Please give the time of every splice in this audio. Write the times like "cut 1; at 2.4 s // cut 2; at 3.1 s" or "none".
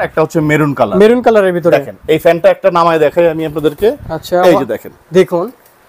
none